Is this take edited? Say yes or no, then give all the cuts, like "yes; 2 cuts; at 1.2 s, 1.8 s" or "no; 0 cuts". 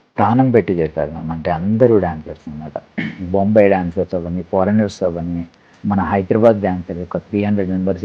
no; 0 cuts